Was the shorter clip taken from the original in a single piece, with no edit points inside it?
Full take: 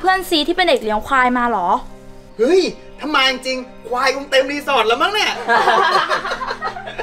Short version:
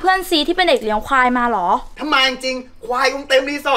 no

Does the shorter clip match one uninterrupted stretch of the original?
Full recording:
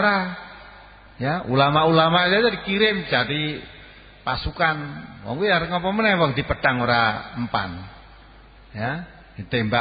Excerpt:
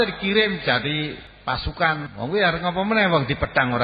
no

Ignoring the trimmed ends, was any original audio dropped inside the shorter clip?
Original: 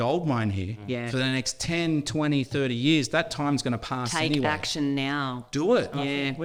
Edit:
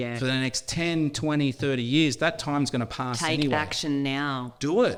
no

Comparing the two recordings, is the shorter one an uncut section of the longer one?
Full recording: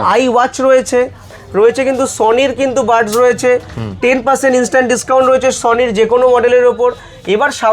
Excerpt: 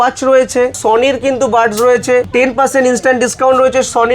no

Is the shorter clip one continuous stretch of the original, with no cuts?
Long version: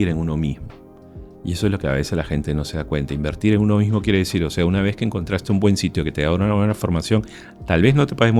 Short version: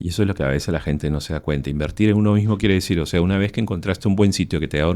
yes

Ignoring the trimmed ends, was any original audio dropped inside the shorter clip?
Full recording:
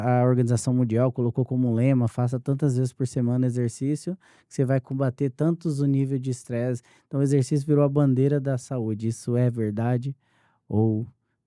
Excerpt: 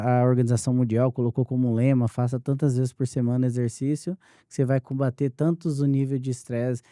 no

